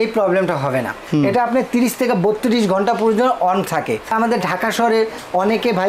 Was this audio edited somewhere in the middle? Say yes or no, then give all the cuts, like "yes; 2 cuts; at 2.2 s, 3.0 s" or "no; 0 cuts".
yes; 2 cuts; at 1.0 s, 4.1 s